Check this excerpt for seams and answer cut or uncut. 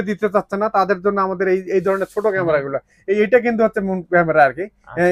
uncut